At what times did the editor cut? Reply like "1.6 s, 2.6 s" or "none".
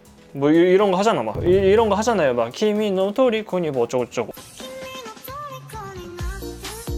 1.3 s, 4.5 s